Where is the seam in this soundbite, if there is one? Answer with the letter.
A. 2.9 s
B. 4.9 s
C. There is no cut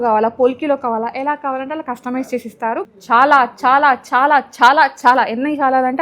A